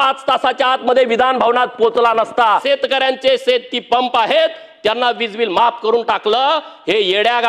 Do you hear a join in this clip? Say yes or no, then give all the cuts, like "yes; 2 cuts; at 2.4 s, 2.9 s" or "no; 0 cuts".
yes; 1 cut; at 2.6 s